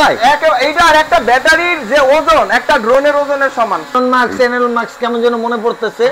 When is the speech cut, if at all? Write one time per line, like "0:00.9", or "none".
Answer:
0:03.9